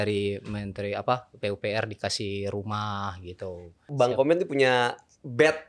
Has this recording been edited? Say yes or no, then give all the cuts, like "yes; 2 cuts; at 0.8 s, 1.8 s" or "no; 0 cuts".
yes; 1 cut; at 3.9 s